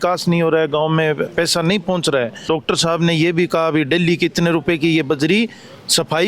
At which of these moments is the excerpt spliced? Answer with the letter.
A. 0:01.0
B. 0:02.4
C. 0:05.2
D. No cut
B